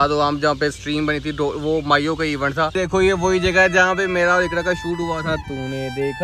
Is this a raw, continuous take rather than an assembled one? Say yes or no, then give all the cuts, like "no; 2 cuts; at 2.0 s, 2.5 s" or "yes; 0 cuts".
no; 1 cut; at 2.7 s